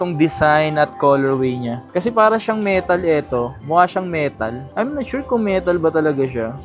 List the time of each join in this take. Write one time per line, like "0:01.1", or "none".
none